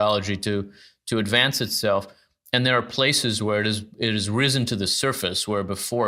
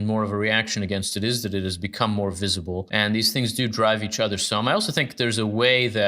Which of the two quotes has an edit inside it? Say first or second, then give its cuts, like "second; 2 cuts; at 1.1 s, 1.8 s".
second; 1 cut; at 2.9 s